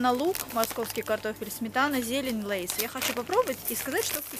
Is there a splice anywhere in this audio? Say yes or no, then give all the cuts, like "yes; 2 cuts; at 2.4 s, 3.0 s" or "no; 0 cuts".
no; 0 cuts